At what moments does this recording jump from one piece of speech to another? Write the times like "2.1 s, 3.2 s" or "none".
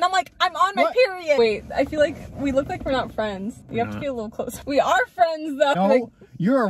1.4 s, 3.6 s, 4.6 s, 5.8 s